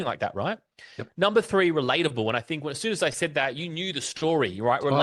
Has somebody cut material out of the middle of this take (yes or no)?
no